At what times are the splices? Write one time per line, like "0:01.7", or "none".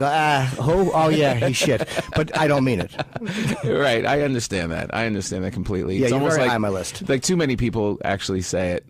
0:05.4